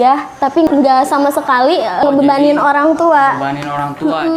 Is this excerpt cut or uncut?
cut